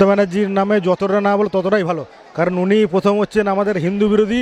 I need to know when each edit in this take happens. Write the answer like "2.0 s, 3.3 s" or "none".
none